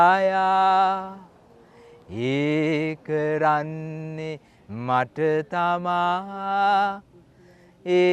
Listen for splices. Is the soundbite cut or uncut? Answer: uncut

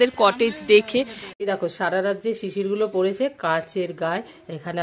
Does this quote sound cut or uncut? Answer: cut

